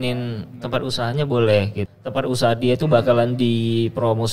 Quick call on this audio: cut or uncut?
cut